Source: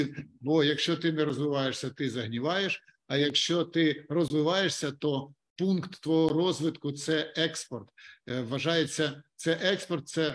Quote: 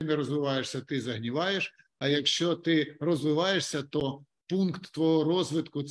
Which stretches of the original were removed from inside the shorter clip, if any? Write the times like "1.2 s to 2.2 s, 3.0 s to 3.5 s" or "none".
none